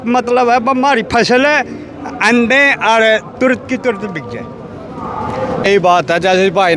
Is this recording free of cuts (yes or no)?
no